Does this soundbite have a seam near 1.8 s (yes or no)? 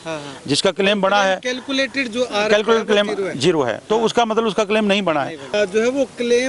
no